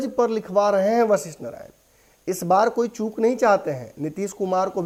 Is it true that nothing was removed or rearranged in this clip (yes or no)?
yes